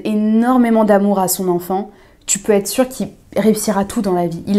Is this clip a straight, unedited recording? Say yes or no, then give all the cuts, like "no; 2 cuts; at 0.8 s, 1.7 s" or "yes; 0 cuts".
yes; 0 cuts